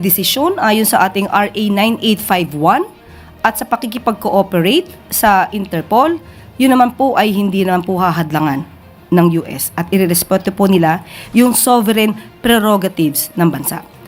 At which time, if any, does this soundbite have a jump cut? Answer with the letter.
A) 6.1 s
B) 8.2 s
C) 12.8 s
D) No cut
D